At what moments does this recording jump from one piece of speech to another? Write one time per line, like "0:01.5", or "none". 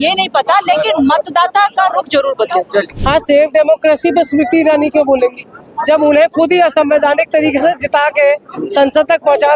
0:02.9